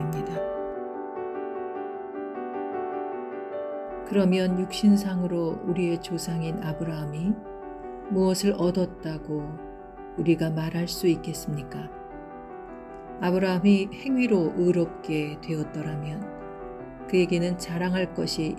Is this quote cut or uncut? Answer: cut